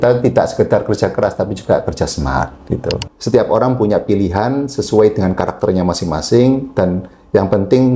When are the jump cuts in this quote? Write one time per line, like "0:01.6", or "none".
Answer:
0:03.1